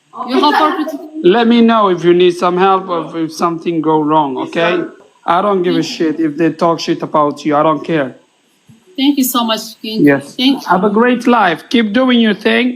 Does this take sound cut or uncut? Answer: cut